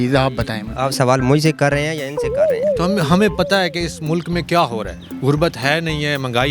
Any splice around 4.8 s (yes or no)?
no